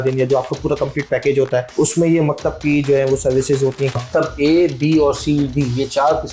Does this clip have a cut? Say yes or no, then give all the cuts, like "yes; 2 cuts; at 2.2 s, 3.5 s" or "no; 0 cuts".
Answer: yes; 2 cuts; at 1.7 s, 3.9 s